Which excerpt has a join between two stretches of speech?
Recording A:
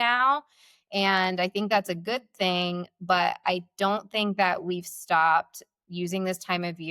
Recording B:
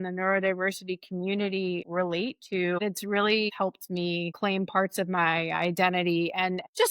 B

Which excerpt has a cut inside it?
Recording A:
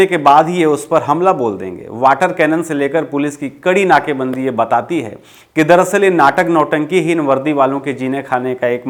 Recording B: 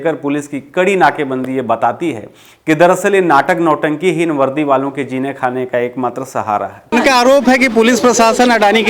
B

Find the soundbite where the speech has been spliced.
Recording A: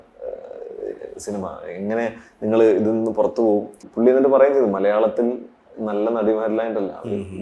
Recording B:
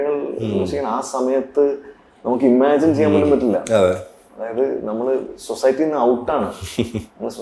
A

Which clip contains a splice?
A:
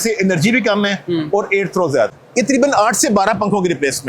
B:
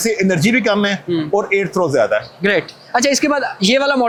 A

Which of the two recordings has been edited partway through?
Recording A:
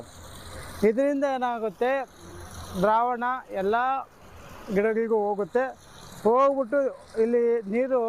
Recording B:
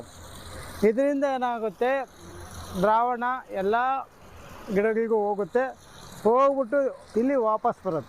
B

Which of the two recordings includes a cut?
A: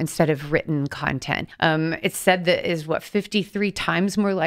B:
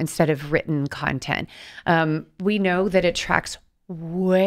A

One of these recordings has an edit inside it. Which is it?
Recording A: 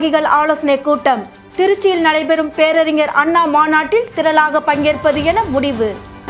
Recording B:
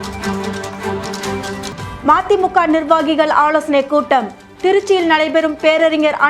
B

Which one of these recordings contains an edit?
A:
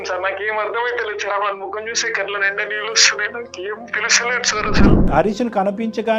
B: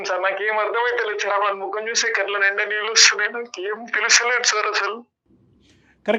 A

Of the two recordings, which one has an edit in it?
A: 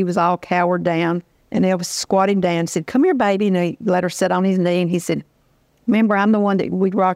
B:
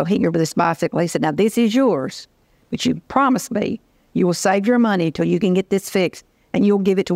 A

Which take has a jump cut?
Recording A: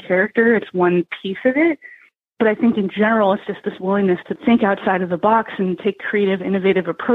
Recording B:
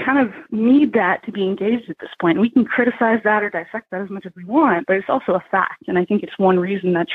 A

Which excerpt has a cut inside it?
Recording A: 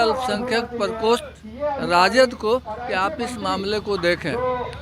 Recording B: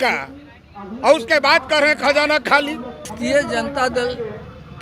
B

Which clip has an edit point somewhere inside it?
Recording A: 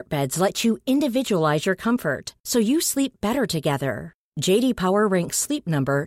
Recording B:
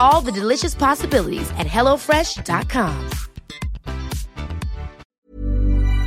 B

